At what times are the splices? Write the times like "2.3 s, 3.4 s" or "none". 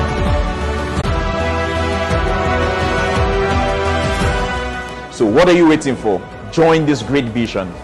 1.0 s